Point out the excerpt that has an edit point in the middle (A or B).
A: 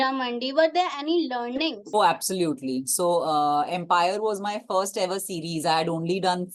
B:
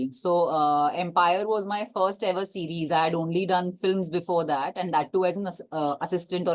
A